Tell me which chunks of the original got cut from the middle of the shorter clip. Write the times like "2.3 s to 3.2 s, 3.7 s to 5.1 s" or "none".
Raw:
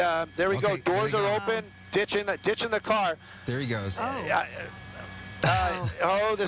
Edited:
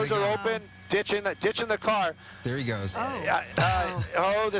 4.5 s to 5.3 s

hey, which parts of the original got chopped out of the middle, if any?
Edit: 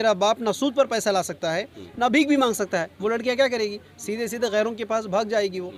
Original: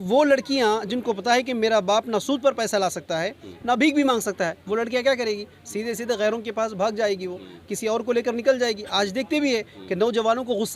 none

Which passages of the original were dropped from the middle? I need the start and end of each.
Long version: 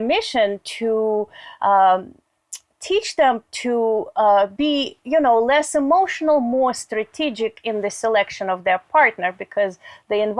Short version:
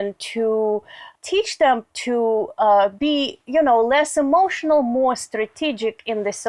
1.4 s to 2.5 s

